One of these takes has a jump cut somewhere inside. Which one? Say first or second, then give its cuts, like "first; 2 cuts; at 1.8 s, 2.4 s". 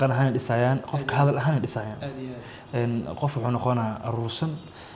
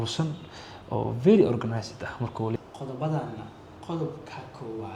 second; 1 cut; at 2.6 s